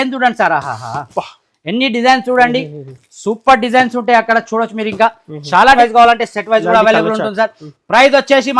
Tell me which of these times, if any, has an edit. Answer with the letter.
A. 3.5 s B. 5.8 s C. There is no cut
B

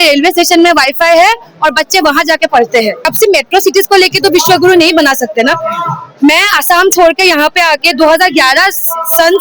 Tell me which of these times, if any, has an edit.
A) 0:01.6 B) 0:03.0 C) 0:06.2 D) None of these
B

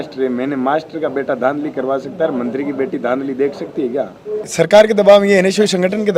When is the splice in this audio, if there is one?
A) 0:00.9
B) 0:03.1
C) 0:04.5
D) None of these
C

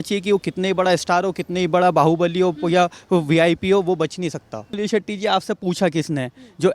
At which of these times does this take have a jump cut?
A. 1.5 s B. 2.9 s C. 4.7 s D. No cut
C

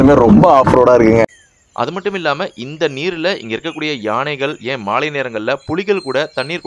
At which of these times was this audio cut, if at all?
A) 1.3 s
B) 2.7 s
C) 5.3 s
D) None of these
A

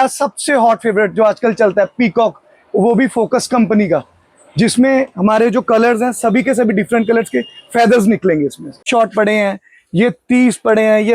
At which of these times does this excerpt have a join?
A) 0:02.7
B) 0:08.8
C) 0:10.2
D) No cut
B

